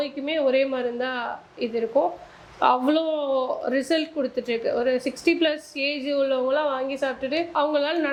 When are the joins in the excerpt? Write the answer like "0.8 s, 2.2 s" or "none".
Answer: none

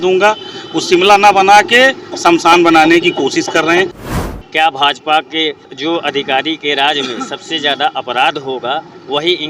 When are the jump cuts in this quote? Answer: 4.1 s, 5.7 s

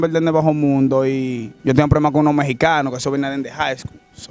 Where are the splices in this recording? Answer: 1.5 s

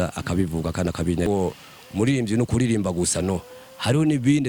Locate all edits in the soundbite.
1.3 s

